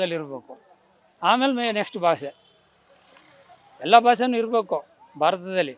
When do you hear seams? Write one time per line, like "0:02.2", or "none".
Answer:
none